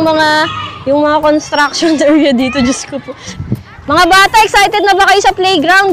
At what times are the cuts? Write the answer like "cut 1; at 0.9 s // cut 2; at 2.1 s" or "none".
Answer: cut 1; at 3.3 s

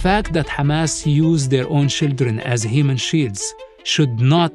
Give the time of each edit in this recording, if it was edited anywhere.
none

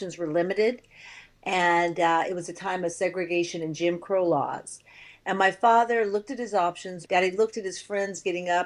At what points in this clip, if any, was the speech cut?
cut 1; at 6.9 s

